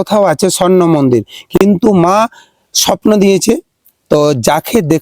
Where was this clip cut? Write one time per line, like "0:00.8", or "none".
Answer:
0:01.5